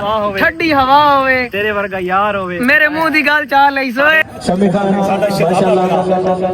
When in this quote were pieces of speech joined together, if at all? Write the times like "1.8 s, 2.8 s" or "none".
4.2 s